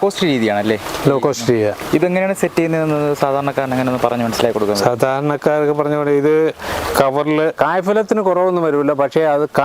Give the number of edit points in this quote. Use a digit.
2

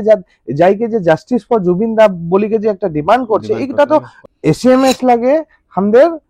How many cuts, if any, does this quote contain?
1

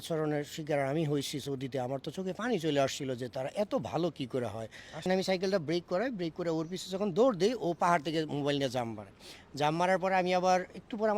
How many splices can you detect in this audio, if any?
1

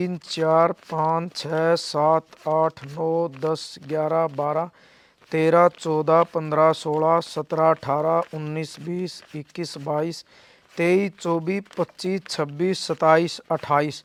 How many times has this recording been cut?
0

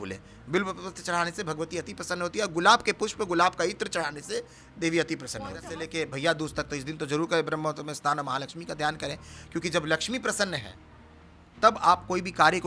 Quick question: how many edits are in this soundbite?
1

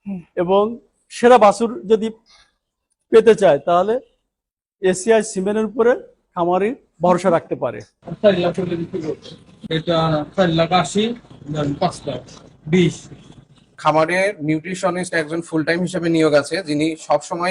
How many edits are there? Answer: 3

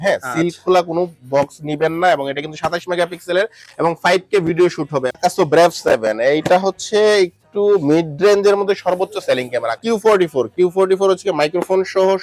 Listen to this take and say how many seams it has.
2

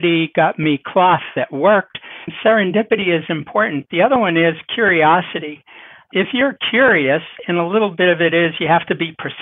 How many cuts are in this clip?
1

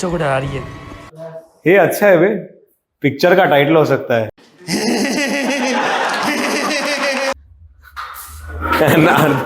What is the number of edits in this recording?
1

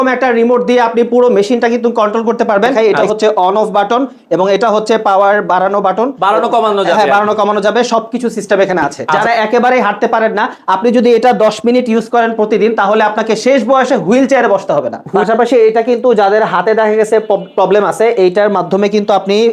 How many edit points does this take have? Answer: 3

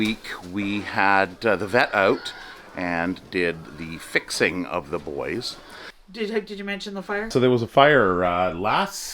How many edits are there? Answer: 2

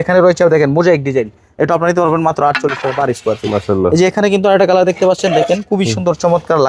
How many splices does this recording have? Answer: 0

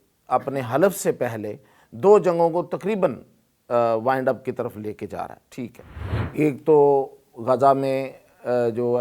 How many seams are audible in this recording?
0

